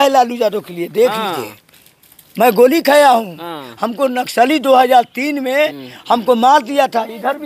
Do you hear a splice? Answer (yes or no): no